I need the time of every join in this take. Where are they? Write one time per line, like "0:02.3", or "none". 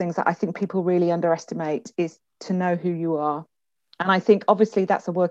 none

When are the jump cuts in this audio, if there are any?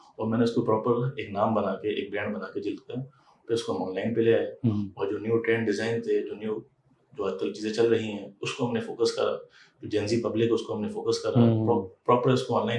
none

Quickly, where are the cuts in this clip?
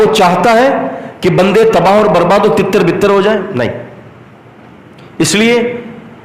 none

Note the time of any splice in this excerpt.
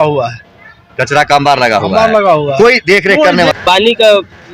0:03.6

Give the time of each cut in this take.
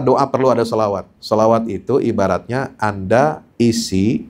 0:01.1
0:03.4

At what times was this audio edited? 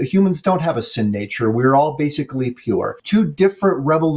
0:03.0

